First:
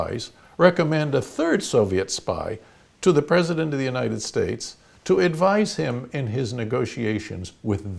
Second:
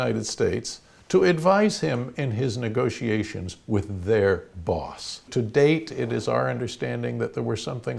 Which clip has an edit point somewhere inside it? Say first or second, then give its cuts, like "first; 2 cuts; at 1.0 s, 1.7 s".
second; 1 cut; at 5.3 s